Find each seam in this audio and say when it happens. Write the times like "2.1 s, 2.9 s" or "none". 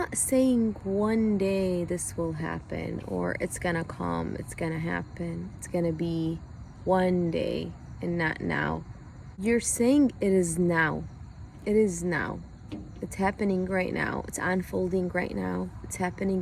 none